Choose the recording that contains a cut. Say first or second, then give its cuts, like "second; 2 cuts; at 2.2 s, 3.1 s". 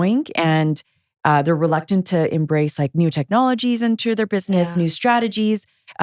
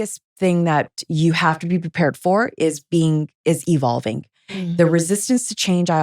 second; 1 cut; at 1.0 s